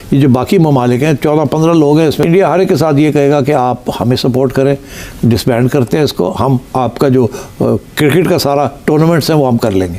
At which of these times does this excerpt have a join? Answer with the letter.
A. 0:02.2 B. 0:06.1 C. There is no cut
A